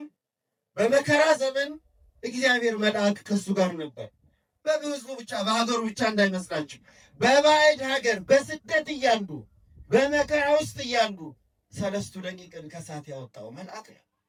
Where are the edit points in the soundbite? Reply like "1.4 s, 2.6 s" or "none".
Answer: none